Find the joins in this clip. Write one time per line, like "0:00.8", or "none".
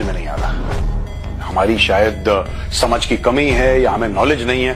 none